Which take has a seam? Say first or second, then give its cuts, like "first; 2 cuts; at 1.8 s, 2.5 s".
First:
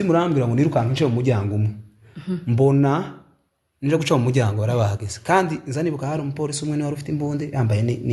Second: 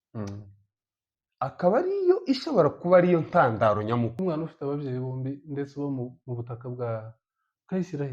second; 1 cut; at 4.2 s